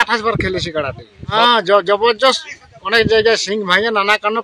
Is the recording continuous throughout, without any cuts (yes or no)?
no